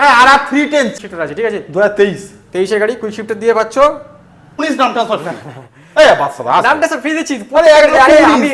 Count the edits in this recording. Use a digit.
2